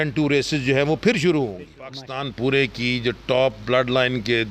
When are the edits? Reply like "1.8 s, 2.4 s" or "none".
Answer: 1.9 s